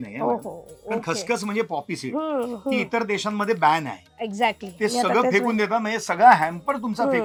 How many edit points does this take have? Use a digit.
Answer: 0